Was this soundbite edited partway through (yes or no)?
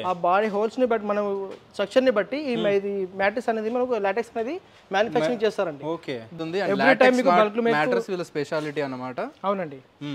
yes